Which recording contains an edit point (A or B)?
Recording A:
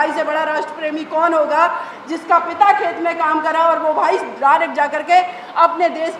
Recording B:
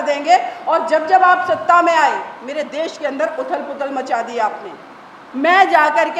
B